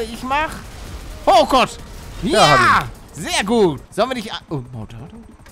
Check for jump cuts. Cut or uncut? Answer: cut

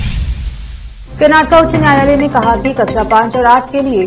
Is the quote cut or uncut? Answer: cut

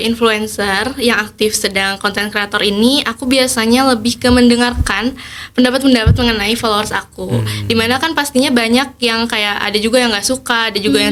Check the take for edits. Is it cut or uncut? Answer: uncut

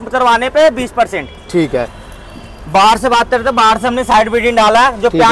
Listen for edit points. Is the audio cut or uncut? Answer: uncut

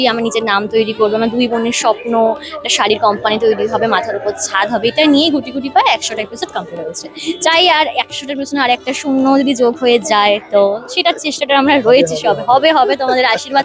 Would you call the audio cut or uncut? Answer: uncut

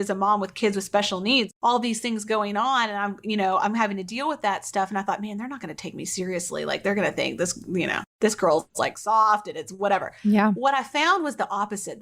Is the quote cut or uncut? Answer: cut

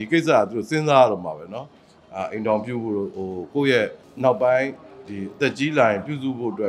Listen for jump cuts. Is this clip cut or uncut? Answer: cut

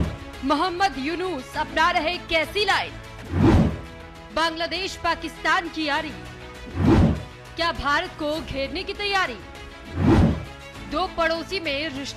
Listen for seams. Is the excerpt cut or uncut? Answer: uncut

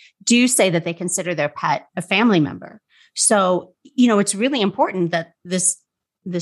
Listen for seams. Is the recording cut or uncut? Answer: uncut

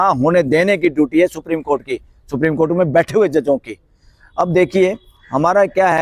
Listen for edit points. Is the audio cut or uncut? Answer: uncut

